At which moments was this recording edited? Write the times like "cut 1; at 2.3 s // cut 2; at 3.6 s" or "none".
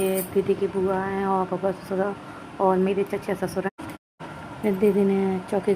cut 1; at 3.7 s